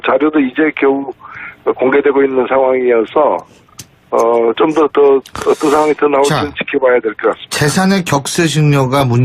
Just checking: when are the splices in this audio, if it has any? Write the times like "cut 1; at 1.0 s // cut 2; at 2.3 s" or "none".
cut 1; at 5.3 s